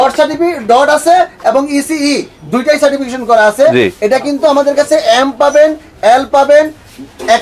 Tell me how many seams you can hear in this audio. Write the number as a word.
zero